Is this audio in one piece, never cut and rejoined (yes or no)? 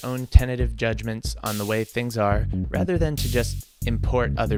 yes